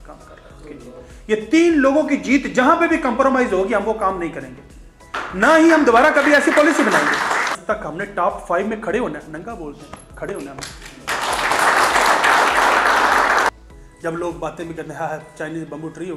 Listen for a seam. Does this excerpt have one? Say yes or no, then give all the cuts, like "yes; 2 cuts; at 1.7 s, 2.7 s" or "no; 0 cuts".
yes; 2 cuts; at 7.6 s, 13.5 s